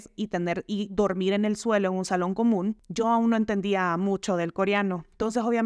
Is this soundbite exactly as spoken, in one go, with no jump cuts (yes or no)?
no